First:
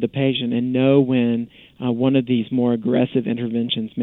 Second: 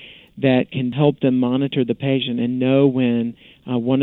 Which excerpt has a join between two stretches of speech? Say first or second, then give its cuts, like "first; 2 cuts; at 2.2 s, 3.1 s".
second; 1 cut; at 0.9 s